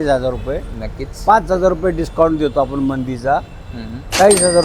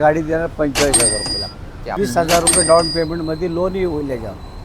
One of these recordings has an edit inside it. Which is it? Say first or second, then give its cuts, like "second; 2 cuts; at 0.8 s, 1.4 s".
second; 1 cut; at 1.8 s